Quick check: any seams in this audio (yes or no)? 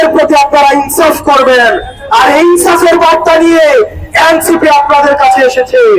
no